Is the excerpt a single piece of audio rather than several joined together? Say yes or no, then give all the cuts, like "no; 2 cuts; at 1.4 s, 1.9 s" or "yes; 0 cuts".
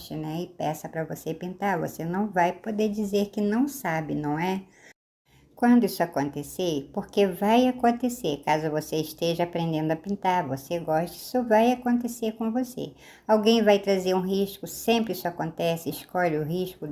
yes; 0 cuts